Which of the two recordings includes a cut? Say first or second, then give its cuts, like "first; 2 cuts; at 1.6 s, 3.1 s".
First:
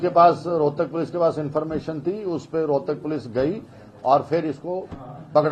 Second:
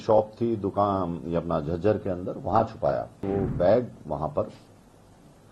second; 1 cut; at 3.2 s